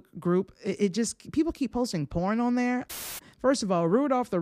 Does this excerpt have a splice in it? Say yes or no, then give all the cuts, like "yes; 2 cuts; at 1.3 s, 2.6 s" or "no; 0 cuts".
yes; 1 cut; at 2.9 s